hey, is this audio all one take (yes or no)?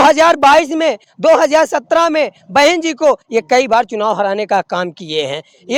yes